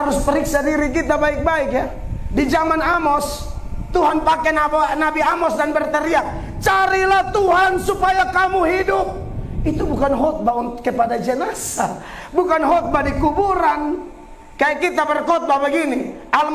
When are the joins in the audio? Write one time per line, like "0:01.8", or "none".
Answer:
none